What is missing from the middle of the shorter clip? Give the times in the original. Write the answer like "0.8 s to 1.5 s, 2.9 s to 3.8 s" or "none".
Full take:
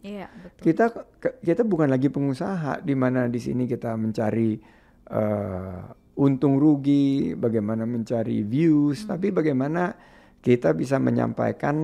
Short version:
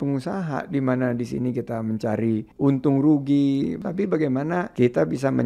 4.6 s to 6.1 s, 7.3 s to 9.0 s, 9.9 s to 10.4 s